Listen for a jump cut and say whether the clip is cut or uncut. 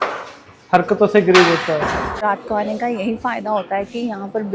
cut